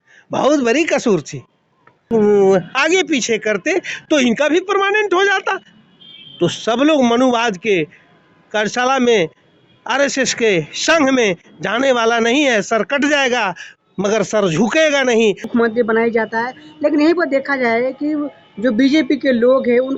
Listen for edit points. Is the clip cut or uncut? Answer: cut